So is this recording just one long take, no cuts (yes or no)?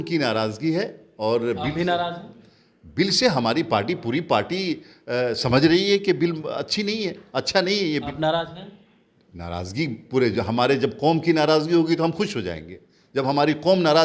yes